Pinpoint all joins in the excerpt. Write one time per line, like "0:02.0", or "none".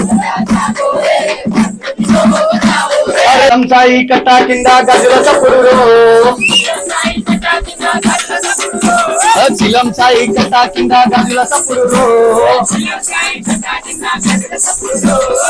0:03.5